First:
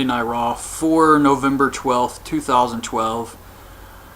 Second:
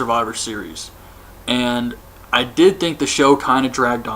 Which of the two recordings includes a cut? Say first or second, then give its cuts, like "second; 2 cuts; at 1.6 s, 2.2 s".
second; 1 cut; at 1.7 s